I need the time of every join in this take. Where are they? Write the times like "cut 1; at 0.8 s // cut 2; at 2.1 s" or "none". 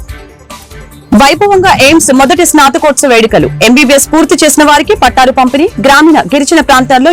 cut 1; at 1.0 s